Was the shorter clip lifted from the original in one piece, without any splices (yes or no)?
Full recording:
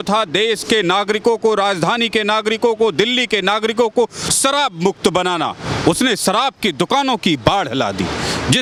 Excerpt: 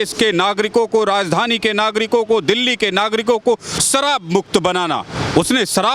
yes